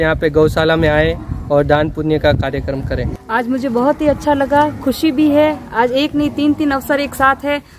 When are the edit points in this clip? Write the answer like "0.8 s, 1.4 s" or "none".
3.1 s

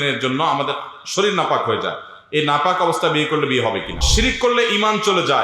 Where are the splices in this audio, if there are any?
4.0 s

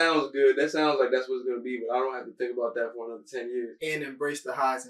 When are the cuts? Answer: 3.7 s

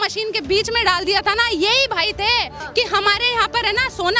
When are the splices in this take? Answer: 2.6 s

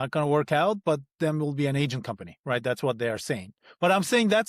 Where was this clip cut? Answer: none

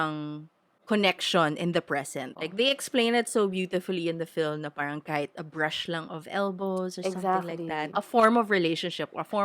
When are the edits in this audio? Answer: 2.4 s, 7.9 s

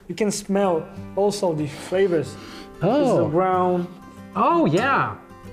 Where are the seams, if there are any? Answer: none

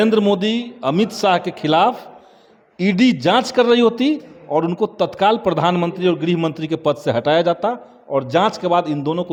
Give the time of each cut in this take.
none

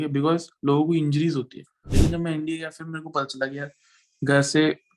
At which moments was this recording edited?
1.9 s

